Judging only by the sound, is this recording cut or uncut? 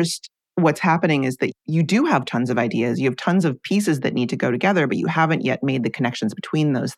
uncut